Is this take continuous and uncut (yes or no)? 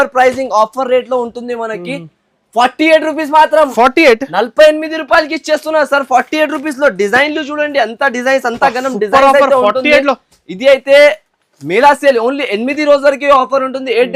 yes